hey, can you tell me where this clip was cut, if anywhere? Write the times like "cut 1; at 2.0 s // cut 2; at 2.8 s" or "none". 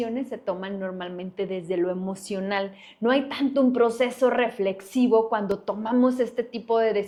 none